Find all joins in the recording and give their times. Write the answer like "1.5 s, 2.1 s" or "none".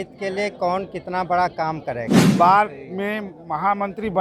2.2 s